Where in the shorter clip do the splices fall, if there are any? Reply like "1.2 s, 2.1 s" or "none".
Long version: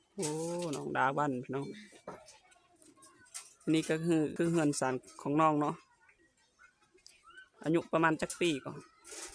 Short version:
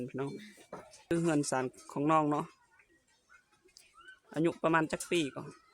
1.0 s